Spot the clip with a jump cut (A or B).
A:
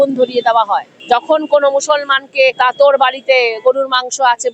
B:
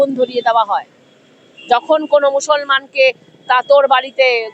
A